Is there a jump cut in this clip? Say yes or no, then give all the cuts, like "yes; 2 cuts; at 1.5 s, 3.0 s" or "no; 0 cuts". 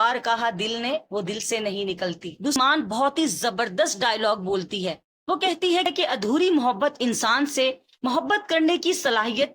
yes; 1 cut; at 2.6 s